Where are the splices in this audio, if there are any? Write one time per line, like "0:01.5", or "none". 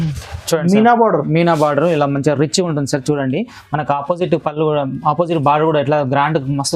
none

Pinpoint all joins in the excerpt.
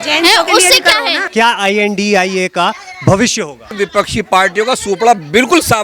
0:01.3
0:03.7

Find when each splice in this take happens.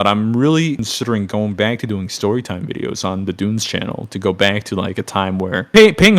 none

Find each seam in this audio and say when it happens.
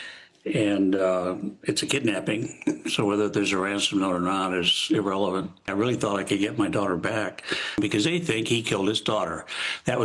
0:05.7
0:07.8

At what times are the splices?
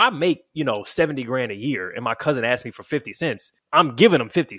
0:03.5

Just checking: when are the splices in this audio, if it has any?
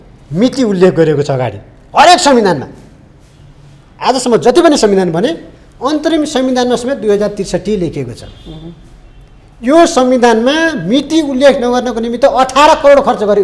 none

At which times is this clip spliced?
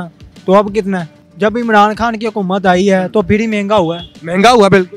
0:01.2

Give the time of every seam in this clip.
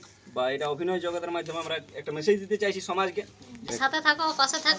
0:03.7

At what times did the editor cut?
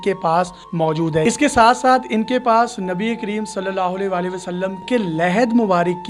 0:01.2
0:04.8

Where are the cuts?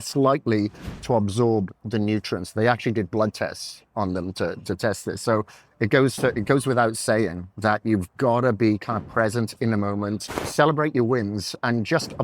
0:10.5

